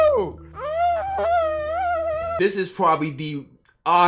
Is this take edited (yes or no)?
yes